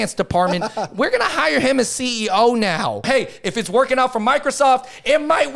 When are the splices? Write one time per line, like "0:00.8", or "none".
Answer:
0:03.0